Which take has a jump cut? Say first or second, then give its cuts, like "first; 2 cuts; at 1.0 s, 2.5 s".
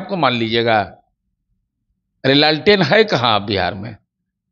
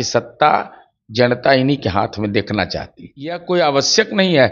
second; 1 cut; at 3.4 s